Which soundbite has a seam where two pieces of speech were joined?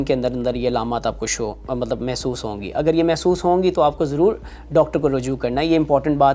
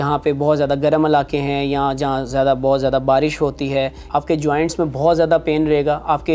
second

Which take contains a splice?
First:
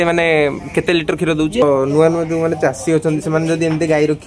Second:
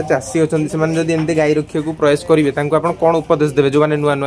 first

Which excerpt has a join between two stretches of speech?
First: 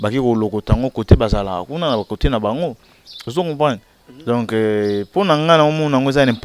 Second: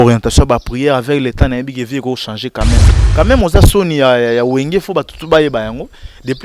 second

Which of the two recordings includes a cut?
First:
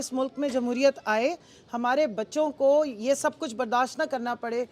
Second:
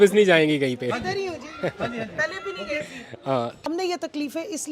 second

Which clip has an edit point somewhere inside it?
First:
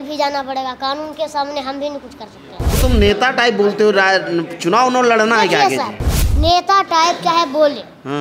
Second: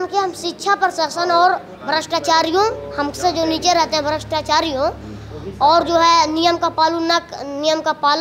first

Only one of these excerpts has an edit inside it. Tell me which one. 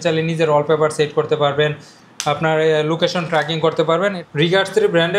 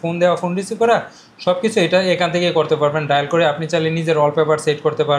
first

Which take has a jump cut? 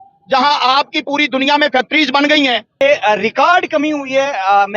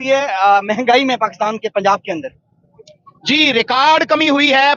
first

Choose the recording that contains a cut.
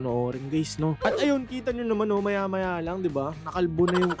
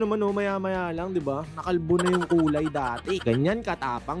first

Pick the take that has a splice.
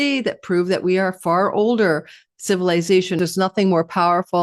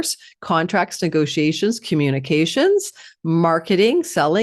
first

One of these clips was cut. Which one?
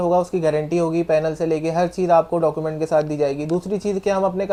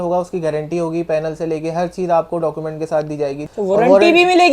second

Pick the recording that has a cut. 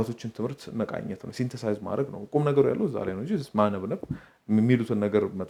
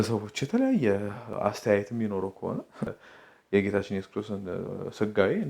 second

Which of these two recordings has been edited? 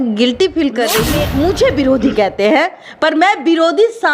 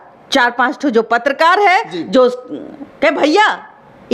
first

